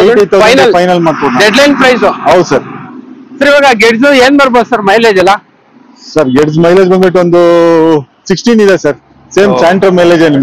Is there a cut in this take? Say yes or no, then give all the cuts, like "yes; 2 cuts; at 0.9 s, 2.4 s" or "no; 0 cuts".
no; 0 cuts